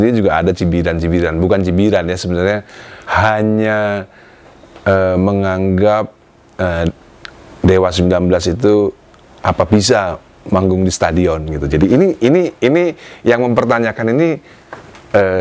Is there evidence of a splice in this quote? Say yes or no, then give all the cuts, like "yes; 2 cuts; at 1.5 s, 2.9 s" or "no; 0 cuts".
no; 0 cuts